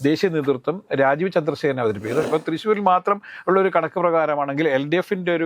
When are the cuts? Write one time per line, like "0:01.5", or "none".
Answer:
0:02.3